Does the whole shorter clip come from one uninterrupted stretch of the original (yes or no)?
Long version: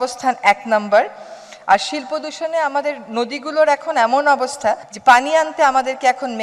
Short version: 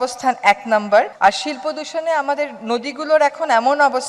no